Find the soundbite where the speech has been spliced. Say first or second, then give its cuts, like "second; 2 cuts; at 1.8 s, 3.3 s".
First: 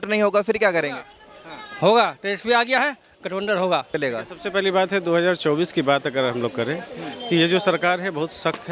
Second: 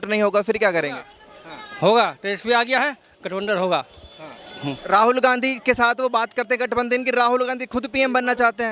first; 1 cut; at 3.9 s